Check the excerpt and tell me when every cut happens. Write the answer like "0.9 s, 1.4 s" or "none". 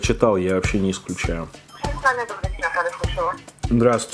1.6 s